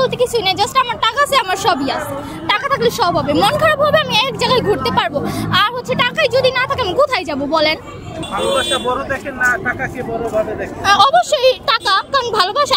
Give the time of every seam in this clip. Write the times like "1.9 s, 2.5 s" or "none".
8.1 s